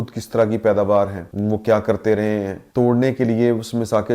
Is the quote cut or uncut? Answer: cut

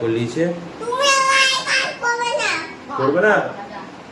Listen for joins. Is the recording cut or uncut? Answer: uncut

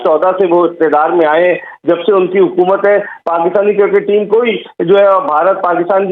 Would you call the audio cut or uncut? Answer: uncut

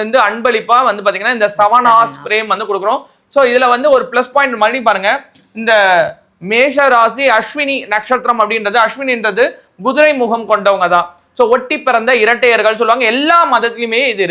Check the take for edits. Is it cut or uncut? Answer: uncut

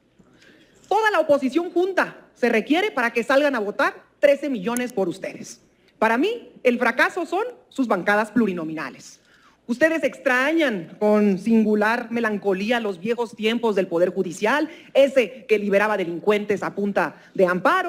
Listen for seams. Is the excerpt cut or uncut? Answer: uncut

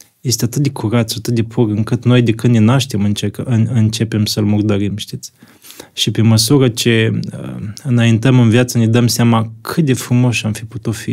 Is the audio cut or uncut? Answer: uncut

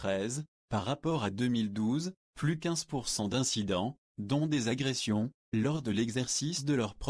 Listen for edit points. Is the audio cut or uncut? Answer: cut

